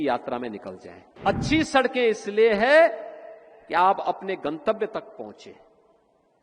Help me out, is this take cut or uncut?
cut